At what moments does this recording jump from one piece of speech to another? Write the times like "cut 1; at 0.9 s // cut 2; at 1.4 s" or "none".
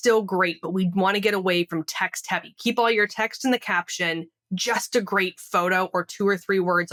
none